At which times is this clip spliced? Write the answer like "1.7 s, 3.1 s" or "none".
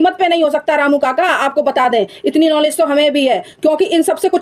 none